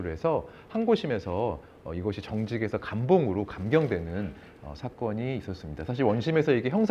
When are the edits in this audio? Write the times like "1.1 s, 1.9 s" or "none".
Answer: none